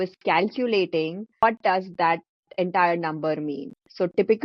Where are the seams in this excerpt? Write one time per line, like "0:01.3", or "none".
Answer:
0:01.4